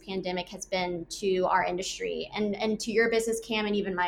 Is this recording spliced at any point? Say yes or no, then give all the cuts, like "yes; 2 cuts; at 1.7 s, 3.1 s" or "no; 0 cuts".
no; 0 cuts